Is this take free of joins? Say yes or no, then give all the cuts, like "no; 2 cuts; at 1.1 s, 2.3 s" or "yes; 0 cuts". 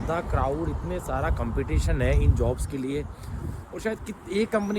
yes; 0 cuts